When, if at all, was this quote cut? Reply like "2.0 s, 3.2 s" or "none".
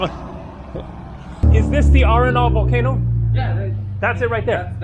1.4 s